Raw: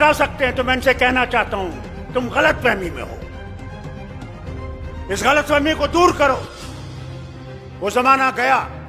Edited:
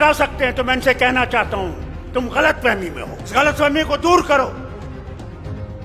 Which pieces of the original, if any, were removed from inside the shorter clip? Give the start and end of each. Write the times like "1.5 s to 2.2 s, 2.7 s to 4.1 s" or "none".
3.3 s to 5.2 s